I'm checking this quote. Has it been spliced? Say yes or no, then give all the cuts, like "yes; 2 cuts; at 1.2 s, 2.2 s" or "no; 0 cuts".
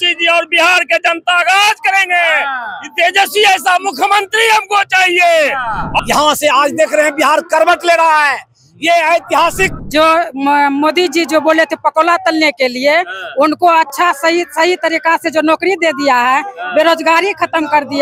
yes; 2 cuts; at 6.0 s, 9.7 s